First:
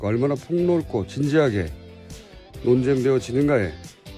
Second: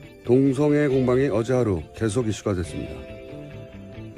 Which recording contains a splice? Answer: first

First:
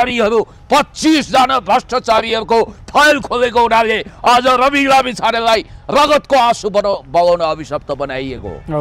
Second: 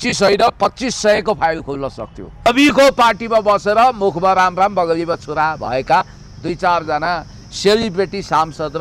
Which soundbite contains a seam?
second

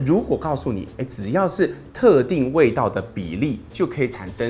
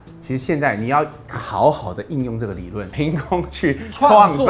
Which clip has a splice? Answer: second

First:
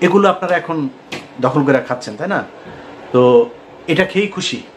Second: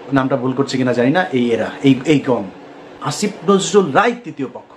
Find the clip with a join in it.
second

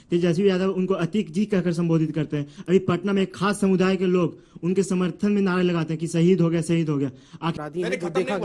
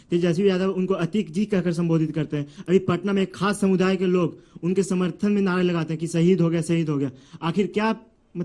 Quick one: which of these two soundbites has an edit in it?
first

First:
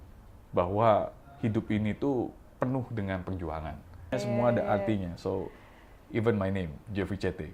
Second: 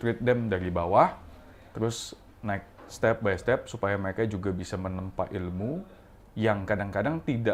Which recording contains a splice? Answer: first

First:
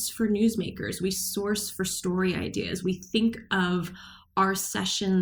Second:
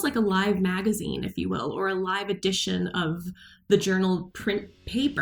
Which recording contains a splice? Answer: second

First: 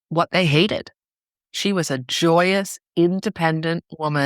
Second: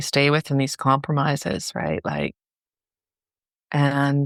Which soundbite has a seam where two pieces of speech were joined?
first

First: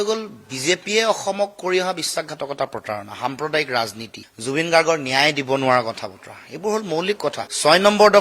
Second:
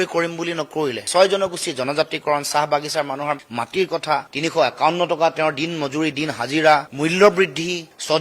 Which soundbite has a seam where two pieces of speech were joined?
second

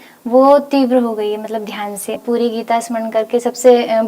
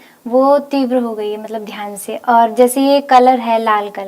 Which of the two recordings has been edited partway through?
first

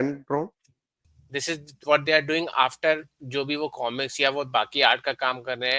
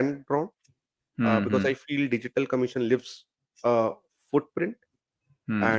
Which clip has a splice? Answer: first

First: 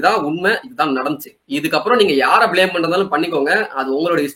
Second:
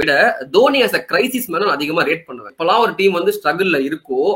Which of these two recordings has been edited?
second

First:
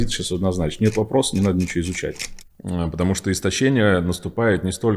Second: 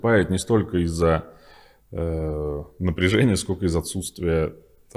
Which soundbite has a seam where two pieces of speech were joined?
first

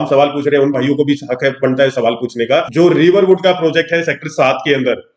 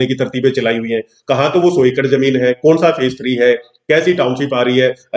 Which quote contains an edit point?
first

